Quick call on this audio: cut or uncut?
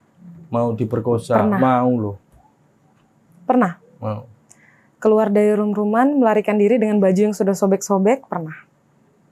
uncut